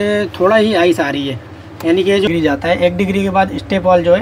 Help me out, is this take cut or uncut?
cut